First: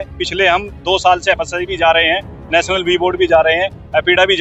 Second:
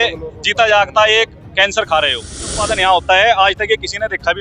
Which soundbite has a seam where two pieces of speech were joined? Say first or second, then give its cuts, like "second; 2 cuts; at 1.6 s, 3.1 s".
second; 1 cut; at 2.6 s